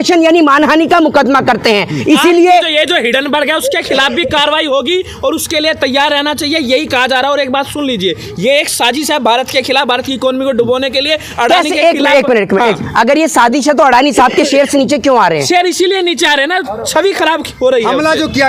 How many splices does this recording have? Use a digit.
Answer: 0